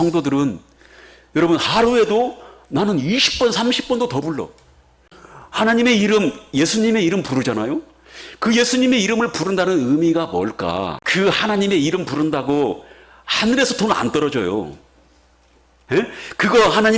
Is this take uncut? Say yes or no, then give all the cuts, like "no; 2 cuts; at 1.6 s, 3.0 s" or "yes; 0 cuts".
no; 1 cut; at 11.0 s